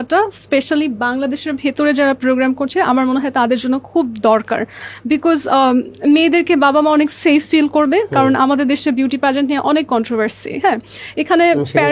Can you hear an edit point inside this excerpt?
no; 0 cuts

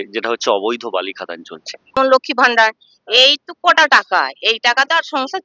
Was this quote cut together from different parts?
yes; 1 cut; at 2.0 s

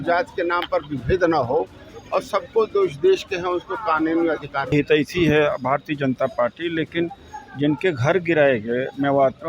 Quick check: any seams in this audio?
yes; 1 cut; at 4.7 s

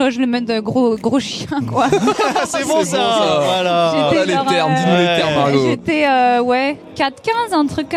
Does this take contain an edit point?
no; 0 cuts

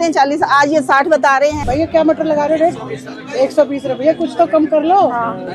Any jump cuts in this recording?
yes; 1 cut; at 1.6 s

